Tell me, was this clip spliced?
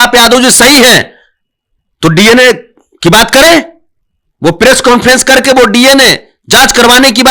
no; 0 cuts

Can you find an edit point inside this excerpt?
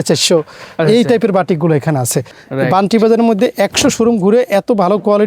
yes; 1 cut; at 2.3 s

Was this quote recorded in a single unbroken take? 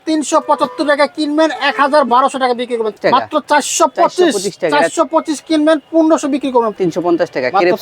no; 2 cuts; at 3.0 s, 6.8 s

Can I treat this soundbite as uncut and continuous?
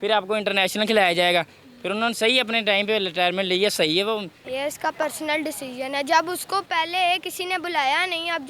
no; 1 cut; at 4.4 s

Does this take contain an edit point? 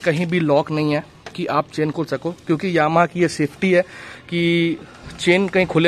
no; 0 cuts

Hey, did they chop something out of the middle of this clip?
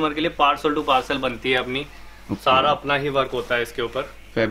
no; 0 cuts

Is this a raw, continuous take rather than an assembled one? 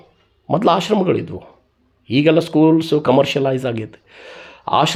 yes; 0 cuts

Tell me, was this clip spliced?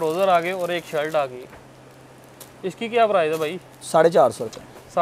no; 0 cuts

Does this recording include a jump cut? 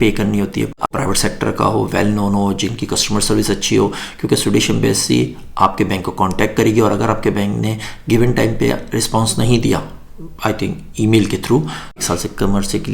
yes; 2 cuts; at 0.9 s, 12.0 s

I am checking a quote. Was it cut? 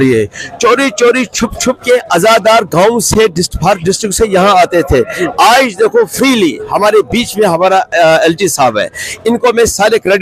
no; 0 cuts

